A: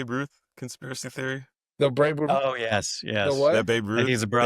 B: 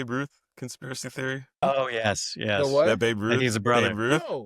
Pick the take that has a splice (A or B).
B